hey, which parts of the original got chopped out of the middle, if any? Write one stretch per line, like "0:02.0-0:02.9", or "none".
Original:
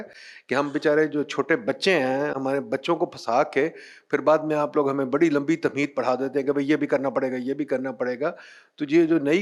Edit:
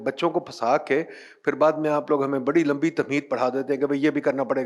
none